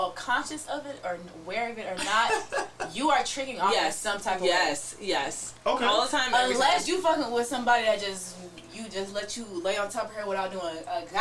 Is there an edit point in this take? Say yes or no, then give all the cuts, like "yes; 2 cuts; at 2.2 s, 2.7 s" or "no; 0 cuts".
no; 0 cuts